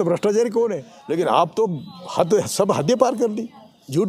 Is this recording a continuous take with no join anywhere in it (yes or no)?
no